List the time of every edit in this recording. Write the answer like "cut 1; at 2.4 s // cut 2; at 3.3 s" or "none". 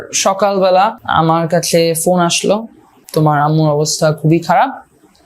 cut 1; at 1.0 s // cut 2; at 3.0 s